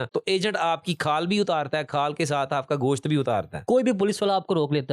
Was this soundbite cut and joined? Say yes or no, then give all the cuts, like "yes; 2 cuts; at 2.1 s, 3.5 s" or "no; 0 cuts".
yes; 1 cut; at 3.6 s